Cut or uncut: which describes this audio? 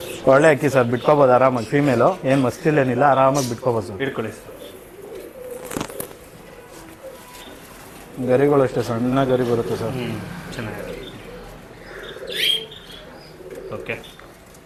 uncut